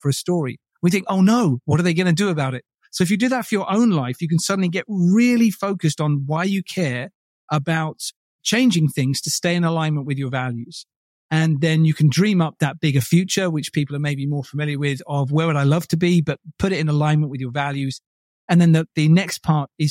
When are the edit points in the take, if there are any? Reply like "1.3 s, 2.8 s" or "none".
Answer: none